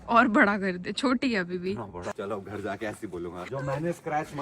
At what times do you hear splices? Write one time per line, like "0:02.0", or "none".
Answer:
0:02.1
0:03.5

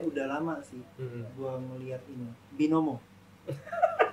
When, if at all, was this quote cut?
none

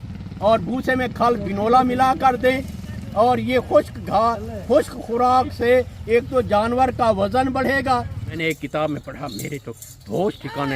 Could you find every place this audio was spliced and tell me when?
0:08.4

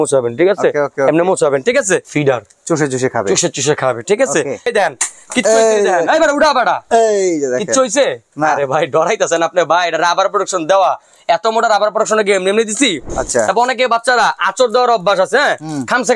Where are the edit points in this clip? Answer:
0:02.1
0:04.7
0:13.2

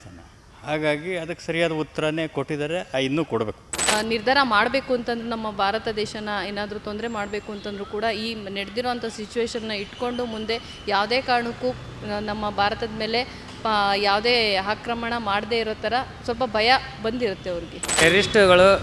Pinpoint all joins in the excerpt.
0:03.9
0:18.0

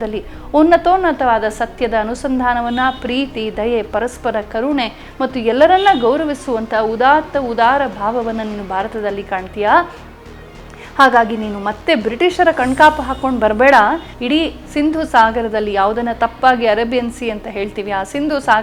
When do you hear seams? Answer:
0:14.1

